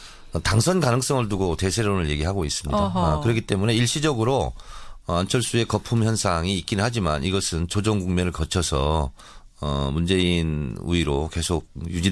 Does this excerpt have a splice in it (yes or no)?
no